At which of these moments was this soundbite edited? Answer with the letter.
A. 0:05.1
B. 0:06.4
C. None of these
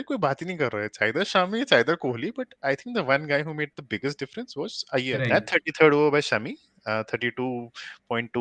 A